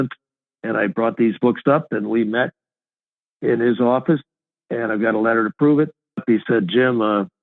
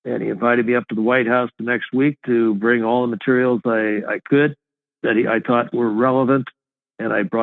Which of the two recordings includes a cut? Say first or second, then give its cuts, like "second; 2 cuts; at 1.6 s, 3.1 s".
first; 1 cut; at 6.2 s